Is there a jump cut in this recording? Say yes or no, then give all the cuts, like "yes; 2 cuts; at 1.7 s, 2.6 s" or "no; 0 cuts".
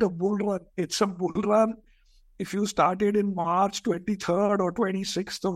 no; 0 cuts